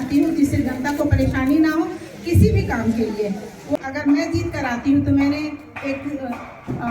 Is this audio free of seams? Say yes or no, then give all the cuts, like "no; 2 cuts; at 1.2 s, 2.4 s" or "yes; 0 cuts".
no; 1 cut; at 3.8 s